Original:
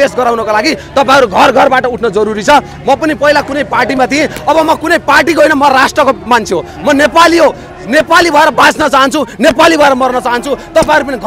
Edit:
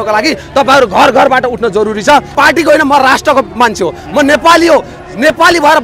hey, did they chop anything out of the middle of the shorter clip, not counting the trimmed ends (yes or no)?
yes